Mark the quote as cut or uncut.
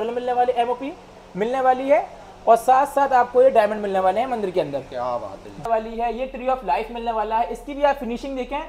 cut